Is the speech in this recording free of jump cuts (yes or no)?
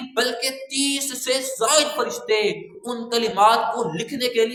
yes